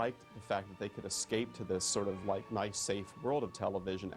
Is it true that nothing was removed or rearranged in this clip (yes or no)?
yes